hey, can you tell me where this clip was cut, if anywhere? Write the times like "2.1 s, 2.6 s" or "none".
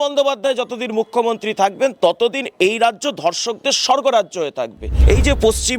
4.9 s